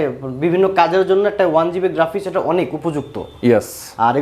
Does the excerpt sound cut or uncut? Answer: uncut